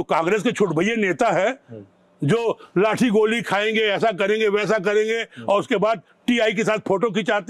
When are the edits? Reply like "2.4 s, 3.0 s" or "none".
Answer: none